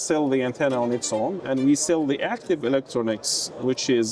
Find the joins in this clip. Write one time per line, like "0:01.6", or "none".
0:01.4